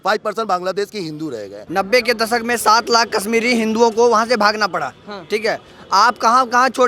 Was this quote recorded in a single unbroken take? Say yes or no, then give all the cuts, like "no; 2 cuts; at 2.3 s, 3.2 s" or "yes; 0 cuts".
no; 1 cut; at 1.5 s